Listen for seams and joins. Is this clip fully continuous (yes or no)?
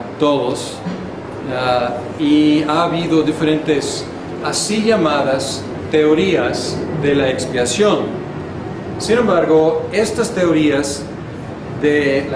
yes